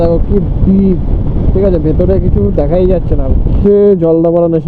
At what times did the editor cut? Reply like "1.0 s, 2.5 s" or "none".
3.5 s